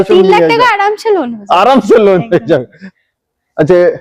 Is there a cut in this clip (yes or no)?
no